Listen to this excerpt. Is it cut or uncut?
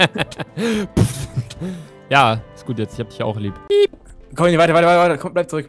cut